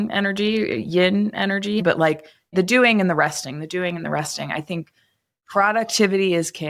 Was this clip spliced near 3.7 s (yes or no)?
no